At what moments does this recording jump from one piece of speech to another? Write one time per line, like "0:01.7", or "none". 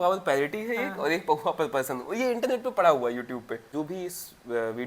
0:03.7